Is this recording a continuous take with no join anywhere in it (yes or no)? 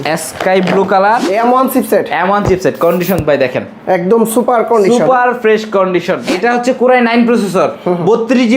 no